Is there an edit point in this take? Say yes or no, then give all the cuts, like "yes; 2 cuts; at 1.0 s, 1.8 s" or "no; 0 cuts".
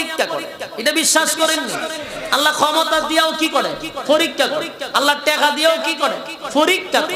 no; 0 cuts